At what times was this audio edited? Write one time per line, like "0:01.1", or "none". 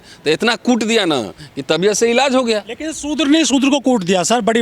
none